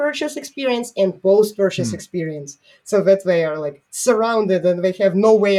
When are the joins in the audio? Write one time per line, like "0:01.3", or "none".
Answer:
none